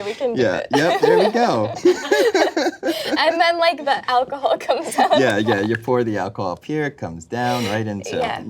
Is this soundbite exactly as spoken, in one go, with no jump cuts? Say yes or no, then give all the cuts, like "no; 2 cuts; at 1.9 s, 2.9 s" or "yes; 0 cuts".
no; 2 cuts; at 1.7 s, 3.8 s